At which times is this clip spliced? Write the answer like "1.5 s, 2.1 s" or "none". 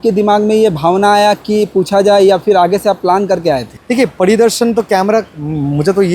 3.7 s